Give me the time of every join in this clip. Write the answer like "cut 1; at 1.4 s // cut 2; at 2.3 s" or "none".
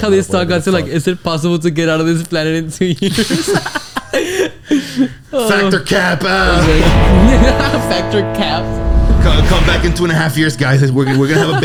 none